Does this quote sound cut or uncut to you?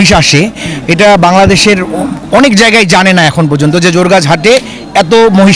uncut